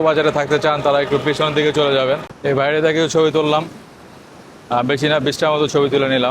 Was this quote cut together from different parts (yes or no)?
yes